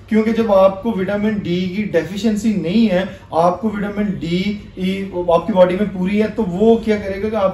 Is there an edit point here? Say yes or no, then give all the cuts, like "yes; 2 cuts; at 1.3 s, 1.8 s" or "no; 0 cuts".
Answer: no; 0 cuts